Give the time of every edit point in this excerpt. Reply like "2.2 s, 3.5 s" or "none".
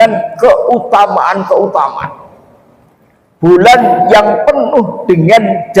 none